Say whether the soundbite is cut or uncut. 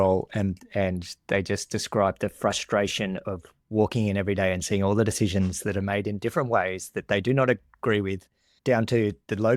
uncut